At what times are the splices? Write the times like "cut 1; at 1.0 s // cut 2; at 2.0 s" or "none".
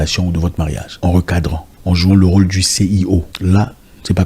cut 1; at 0.9 s // cut 2; at 1.7 s // cut 3; at 3.3 s